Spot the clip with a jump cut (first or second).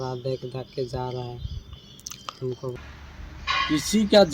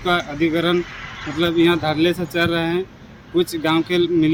first